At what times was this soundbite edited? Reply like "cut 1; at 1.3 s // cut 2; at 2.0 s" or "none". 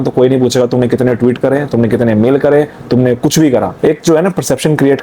cut 1; at 3.7 s